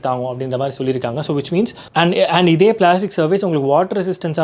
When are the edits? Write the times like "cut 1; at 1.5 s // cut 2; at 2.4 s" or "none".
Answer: cut 1; at 1.8 s